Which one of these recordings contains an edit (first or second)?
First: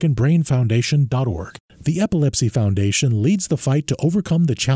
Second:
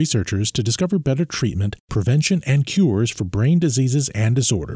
first